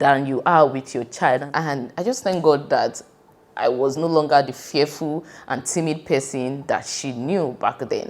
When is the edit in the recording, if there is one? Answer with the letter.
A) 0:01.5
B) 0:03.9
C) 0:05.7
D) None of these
A